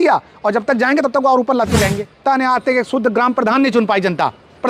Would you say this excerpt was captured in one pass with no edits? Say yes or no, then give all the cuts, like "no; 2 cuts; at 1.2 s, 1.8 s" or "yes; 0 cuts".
no; 1 cut; at 2.2 s